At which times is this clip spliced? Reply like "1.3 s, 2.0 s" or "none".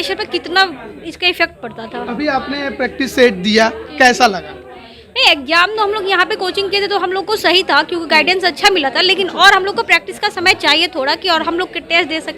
none